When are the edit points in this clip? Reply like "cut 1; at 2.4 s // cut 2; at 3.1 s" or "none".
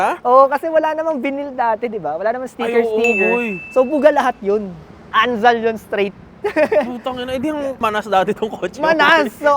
cut 1; at 7.8 s